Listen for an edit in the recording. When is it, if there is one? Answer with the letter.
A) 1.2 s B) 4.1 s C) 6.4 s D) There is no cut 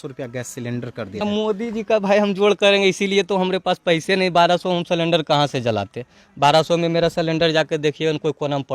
A